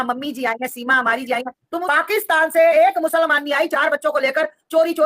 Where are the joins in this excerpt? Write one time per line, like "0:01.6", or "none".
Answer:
0:01.8

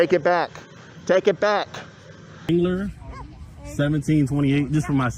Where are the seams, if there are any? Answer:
0:02.5

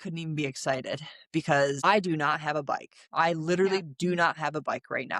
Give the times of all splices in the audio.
0:01.8

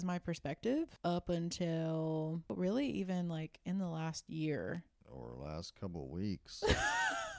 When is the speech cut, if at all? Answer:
0:00.9
0:02.5

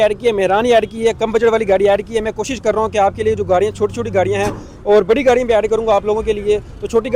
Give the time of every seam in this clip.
none

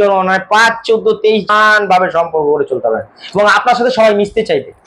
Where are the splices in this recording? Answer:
0:01.5

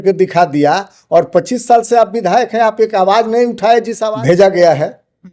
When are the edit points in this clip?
0:04.0

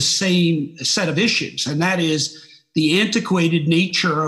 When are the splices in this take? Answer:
none

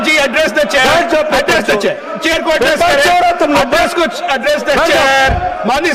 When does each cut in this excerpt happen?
none

